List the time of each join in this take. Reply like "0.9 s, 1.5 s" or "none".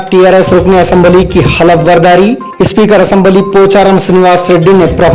none